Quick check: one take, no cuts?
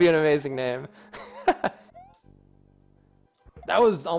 no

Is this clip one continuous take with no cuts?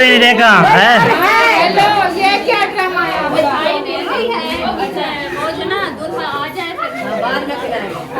yes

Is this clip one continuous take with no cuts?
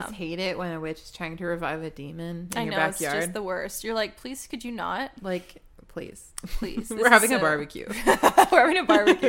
yes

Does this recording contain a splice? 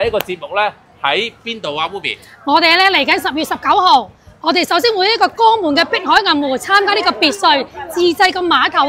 no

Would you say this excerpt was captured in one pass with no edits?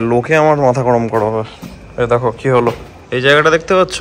yes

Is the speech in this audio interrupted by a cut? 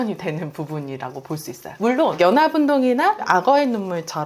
no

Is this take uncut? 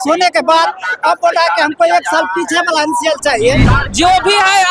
no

